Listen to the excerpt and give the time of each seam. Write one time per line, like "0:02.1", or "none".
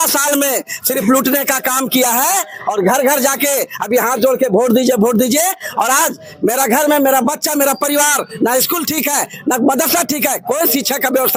none